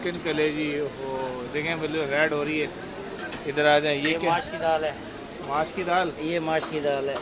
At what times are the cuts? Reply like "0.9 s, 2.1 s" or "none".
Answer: none